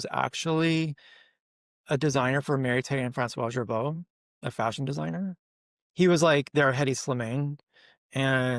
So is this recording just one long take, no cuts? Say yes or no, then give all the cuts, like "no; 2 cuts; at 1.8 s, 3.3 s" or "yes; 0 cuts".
yes; 0 cuts